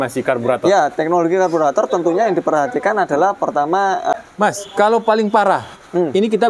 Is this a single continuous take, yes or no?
no